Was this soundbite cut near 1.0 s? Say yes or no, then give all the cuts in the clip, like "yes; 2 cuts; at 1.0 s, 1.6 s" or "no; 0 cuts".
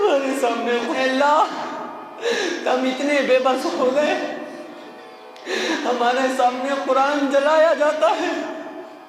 yes; 1 cut; at 1.0 s